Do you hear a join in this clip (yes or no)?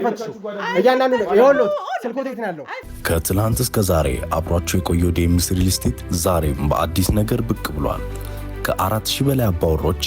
yes